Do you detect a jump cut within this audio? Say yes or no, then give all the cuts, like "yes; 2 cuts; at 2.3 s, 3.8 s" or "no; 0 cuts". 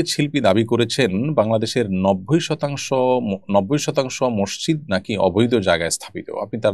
no; 0 cuts